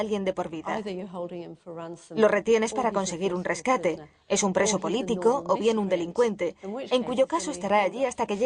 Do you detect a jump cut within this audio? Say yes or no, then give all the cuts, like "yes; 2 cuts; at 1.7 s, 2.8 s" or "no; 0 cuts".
yes; 1 cut; at 7.0 s